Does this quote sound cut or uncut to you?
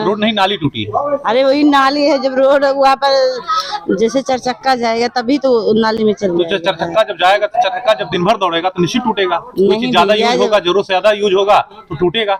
uncut